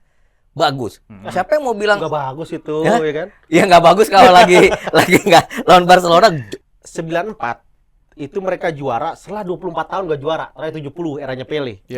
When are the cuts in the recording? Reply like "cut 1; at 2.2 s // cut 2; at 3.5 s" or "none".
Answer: cut 1; at 6.5 s

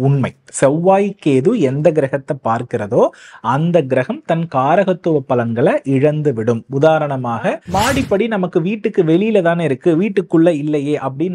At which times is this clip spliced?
cut 1; at 7.6 s

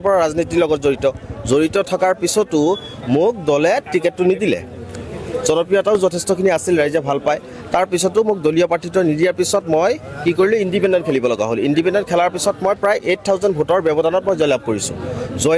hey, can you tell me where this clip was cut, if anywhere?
none

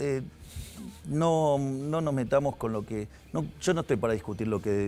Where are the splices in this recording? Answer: none

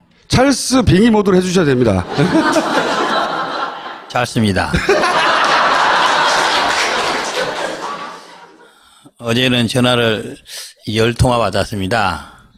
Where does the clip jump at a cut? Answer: none

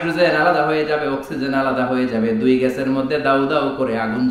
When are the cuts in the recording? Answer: none

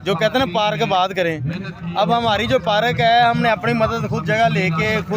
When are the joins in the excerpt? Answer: none

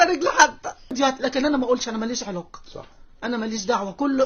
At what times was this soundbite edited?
cut 1; at 0.9 s

